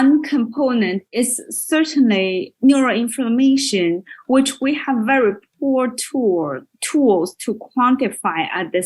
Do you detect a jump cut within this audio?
yes; 1 cut; at 1.0 s

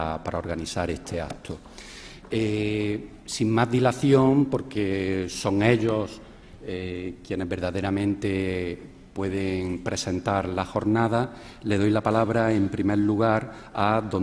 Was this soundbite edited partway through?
no; 0 cuts

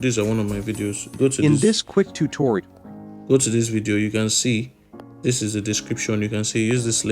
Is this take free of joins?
yes; 0 cuts

